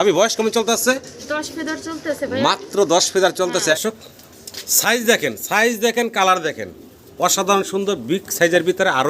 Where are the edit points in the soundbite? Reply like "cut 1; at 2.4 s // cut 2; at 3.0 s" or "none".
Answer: cut 1; at 3.7 s